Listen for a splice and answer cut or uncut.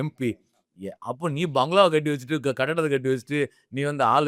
uncut